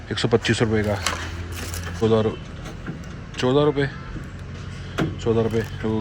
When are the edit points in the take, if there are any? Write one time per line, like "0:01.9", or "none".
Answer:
0:02.0

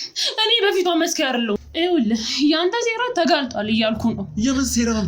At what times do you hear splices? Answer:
0:01.6

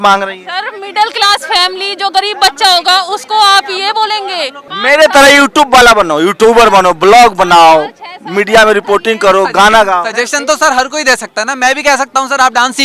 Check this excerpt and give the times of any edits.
0:04.7

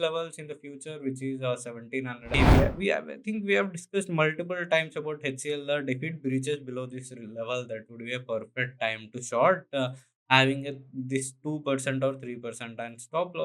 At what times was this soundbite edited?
0:02.4

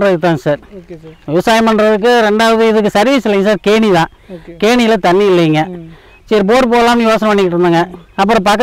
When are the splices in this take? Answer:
none

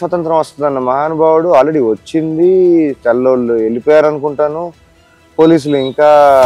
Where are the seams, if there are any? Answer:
none

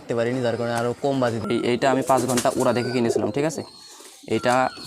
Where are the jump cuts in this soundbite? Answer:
0:01.4

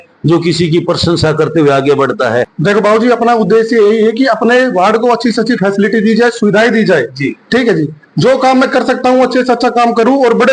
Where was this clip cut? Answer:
0:02.5

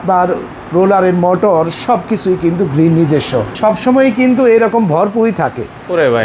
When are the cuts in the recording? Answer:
0:03.5

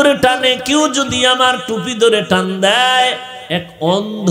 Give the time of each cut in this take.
0:03.3

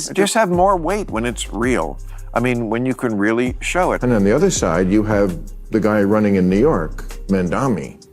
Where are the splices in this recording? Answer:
0:03.8

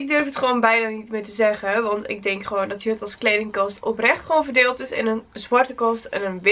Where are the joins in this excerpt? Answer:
none

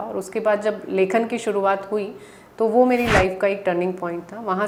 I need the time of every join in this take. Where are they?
none

